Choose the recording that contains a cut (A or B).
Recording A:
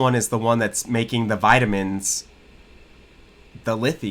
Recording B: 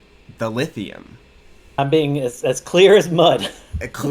B